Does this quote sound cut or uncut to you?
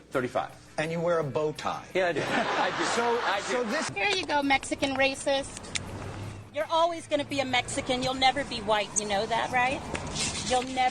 cut